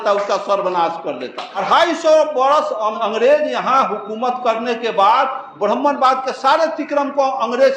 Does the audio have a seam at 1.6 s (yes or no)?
yes